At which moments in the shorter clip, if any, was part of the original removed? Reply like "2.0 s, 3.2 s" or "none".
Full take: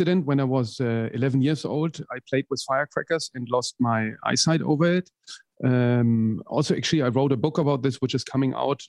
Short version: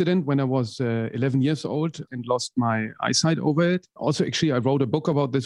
2.1 s, 3.9 s